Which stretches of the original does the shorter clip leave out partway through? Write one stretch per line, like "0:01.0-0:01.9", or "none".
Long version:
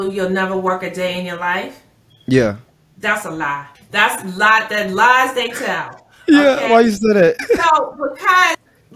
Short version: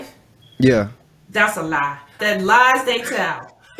0:03.9-0:04.7